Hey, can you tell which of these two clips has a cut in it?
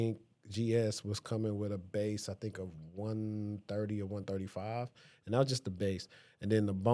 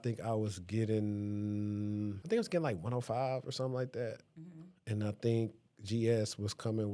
second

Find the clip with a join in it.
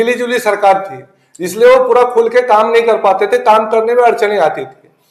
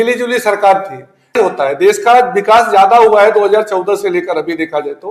second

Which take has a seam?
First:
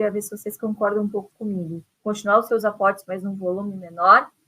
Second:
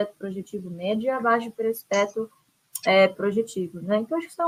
first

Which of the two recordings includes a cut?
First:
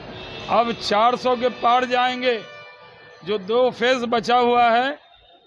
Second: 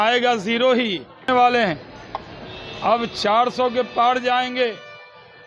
second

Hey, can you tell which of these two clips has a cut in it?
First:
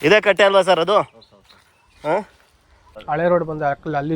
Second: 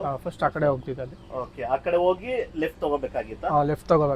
first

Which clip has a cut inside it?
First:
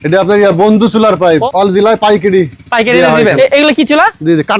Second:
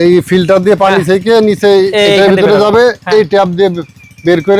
first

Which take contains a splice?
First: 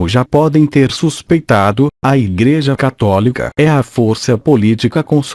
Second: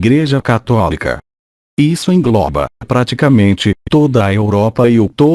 second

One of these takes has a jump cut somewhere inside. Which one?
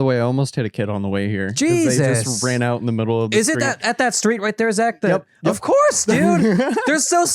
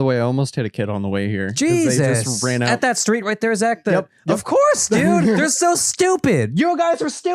second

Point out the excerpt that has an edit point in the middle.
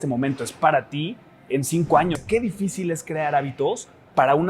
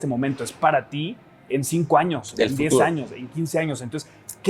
first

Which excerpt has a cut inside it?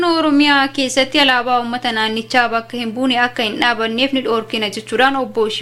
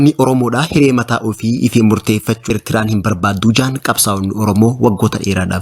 second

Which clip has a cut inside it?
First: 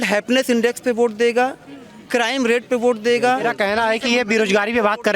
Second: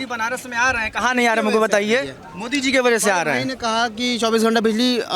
first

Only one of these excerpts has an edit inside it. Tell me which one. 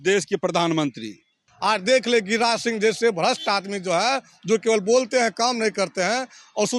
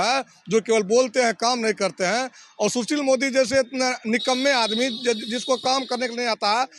first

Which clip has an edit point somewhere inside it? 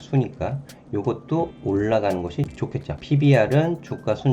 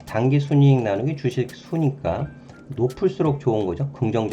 first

